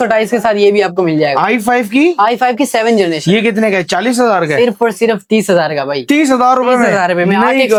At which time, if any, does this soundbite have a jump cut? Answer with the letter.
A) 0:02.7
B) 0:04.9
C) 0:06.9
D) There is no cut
D